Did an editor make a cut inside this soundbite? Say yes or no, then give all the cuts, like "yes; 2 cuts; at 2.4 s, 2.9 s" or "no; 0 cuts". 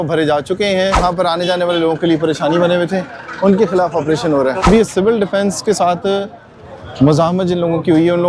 yes; 2 cuts; at 1.0 s, 4.7 s